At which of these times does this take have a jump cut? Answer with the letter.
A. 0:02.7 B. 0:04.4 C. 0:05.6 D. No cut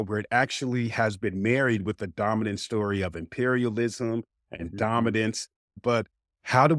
C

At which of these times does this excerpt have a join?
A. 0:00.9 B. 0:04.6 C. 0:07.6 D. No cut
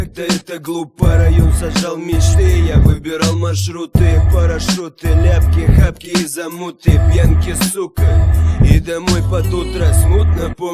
D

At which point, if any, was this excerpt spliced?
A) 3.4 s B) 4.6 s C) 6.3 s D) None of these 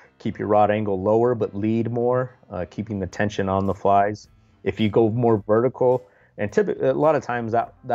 D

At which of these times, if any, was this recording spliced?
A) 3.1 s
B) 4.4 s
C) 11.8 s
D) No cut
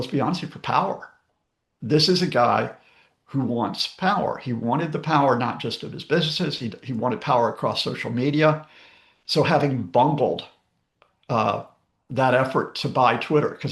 D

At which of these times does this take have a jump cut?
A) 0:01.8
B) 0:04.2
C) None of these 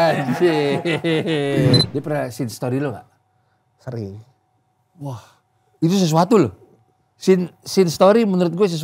A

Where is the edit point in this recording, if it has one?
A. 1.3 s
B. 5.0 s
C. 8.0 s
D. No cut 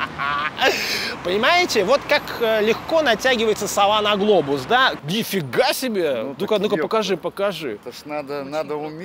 B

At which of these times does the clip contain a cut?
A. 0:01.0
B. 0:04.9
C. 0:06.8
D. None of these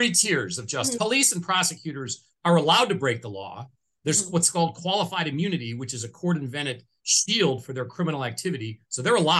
A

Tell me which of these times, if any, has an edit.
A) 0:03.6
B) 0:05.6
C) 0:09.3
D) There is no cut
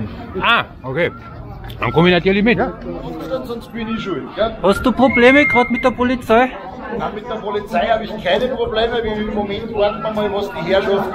A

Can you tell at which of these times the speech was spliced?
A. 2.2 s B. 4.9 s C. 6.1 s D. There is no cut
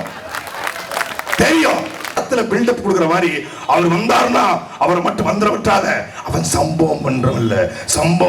A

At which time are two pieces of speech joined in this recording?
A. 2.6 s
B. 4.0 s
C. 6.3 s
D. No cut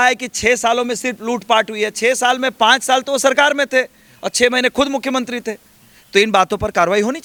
D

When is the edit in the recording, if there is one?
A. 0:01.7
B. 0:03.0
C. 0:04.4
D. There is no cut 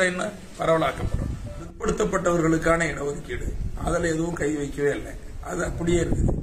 A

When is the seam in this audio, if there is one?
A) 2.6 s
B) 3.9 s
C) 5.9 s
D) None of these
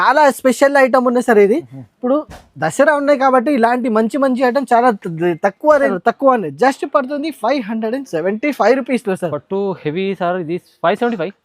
C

